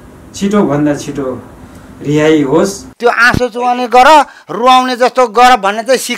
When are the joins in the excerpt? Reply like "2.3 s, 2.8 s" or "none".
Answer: 2.8 s

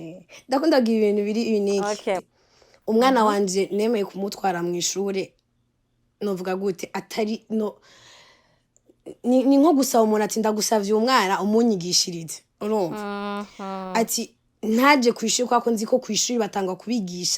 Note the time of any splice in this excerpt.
2.3 s

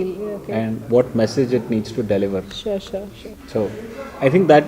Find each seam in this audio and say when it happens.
none

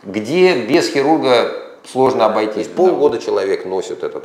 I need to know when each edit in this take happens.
2.6 s

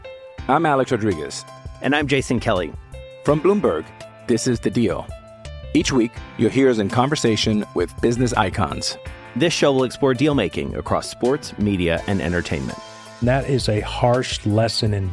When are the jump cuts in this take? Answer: none

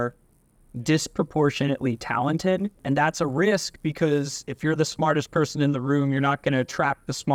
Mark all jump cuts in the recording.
2.8 s

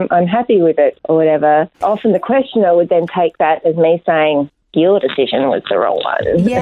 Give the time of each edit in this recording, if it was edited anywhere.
1.0 s

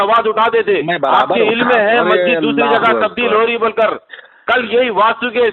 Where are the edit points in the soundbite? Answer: none

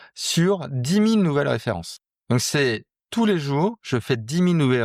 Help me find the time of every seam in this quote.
1.9 s

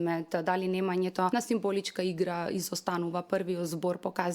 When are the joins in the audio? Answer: 1.3 s

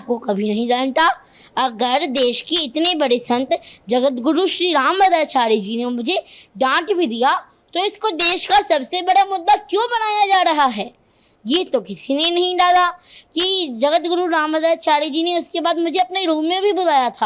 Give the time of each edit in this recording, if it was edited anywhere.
none

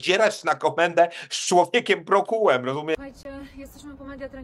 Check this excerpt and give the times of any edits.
none

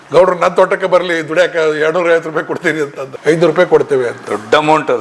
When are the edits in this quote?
3.0 s

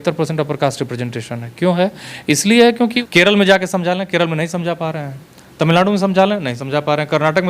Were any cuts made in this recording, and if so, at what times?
3.0 s

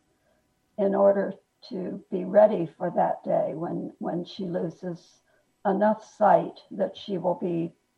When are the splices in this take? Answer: none

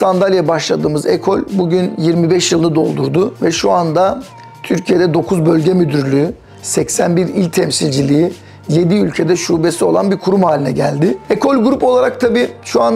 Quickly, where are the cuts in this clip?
11.2 s

